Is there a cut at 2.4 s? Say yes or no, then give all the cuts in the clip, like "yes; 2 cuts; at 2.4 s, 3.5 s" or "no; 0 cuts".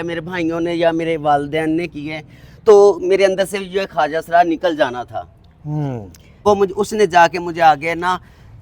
no; 1 cut; at 6.2 s